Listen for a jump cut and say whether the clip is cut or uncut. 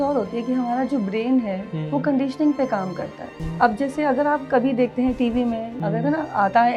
cut